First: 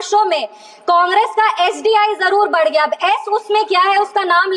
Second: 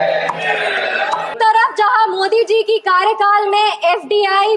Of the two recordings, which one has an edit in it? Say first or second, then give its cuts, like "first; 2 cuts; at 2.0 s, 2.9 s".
second; 1 cut; at 1.3 s